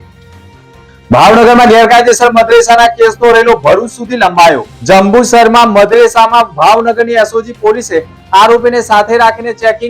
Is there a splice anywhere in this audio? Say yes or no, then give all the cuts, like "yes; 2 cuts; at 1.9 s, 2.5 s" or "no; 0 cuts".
yes; 1 cut; at 1.1 s